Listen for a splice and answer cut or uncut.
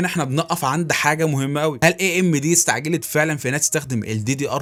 uncut